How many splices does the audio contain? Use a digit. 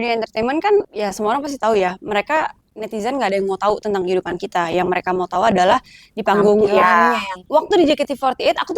2